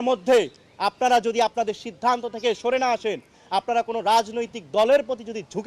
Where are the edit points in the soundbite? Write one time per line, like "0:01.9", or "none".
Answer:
0:03.4